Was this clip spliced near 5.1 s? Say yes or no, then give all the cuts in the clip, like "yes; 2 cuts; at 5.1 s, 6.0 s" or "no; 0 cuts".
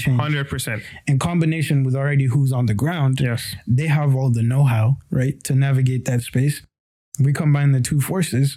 no; 0 cuts